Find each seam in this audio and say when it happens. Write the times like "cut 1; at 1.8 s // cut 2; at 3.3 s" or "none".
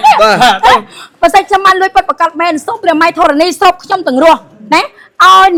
none

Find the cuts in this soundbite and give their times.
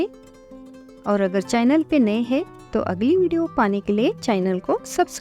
none

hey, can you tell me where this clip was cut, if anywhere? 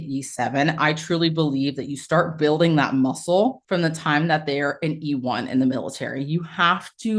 cut 1; at 3.6 s

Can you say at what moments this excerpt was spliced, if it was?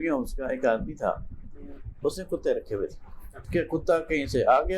cut 1; at 3.4 s

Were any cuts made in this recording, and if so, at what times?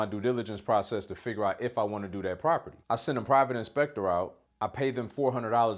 cut 1; at 2.7 s // cut 2; at 4.4 s

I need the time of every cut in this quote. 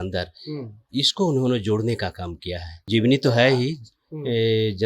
cut 1; at 2.7 s

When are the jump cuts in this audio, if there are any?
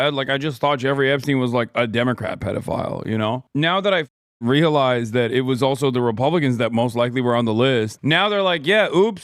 cut 1; at 8.0 s

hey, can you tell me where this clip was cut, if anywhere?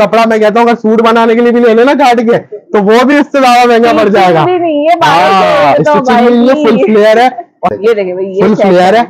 cut 1; at 7.8 s

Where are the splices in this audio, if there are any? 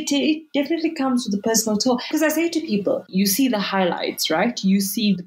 cut 1; at 2.0 s

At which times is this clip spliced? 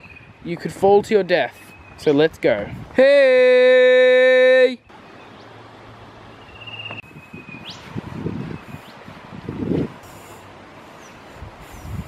none

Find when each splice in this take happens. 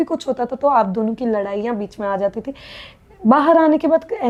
none

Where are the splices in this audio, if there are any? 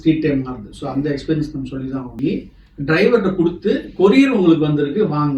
cut 1; at 2.2 s

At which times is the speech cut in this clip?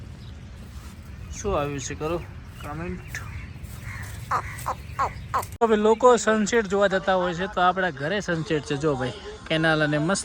cut 1; at 5.5 s

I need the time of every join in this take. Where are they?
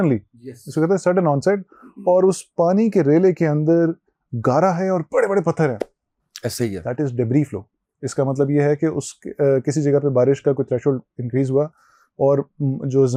none

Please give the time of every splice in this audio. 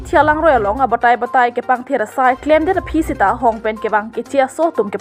none

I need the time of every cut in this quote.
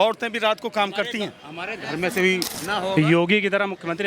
cut 1; at 2.6 s

